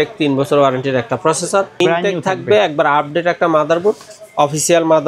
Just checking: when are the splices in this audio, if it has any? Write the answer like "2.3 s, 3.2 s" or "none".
1.8 s